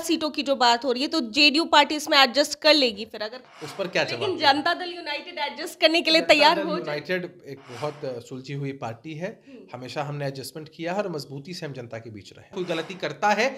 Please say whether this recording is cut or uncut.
cut